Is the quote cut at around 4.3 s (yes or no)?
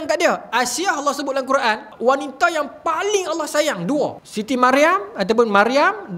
yes